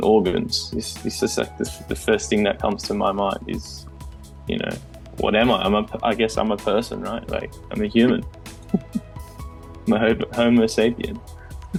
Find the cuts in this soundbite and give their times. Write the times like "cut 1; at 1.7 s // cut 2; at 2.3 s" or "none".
none